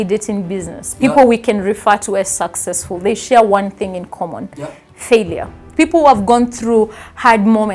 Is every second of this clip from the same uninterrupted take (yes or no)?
no